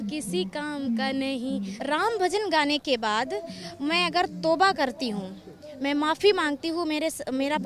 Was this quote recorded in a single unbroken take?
no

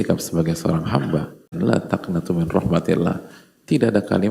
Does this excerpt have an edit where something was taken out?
yes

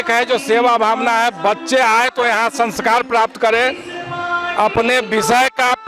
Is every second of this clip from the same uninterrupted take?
yes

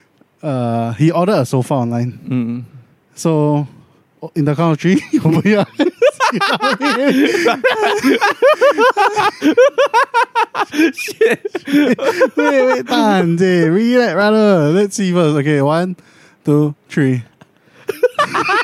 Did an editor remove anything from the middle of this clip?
no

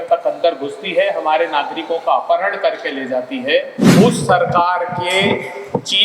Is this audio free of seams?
no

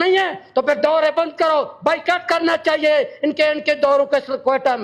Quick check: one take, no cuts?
yes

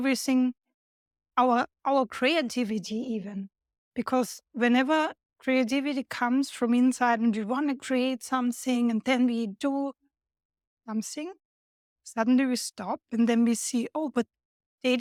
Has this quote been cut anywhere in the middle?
no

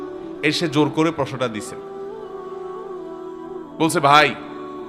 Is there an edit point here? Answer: yes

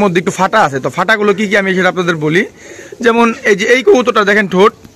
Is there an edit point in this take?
no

